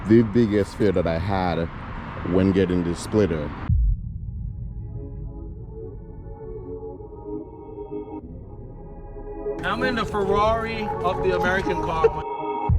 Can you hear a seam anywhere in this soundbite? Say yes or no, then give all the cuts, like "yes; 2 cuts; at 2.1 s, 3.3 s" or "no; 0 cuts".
yes; 1 cut; at 3.7 s